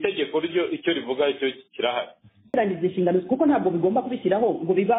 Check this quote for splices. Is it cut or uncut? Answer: cut